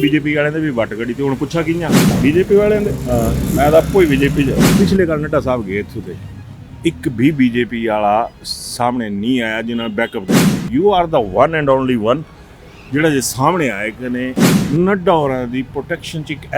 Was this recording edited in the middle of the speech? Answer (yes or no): yes